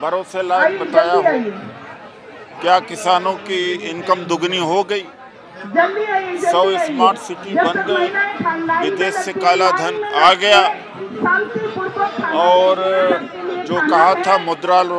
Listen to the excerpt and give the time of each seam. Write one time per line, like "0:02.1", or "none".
none